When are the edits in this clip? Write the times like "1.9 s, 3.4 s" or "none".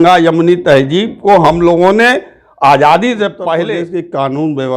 3.7 s